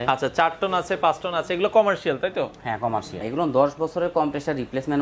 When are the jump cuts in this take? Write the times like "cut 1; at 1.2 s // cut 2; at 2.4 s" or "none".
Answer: cut 1; at 3.2 s